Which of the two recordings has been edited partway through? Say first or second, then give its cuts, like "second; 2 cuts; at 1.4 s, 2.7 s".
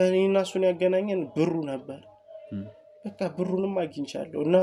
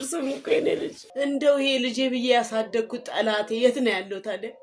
second; 1 cut; at 1.0 s